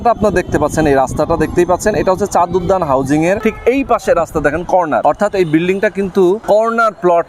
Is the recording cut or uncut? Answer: cut